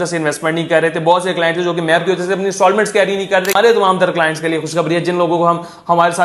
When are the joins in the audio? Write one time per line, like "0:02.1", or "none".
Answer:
0:03.6